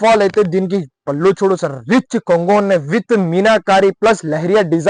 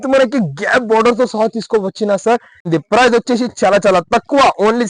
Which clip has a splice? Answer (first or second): second